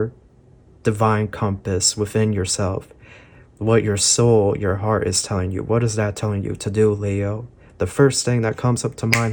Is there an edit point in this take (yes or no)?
no